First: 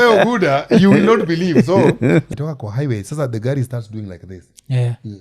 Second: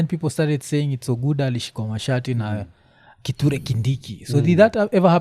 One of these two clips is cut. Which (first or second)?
first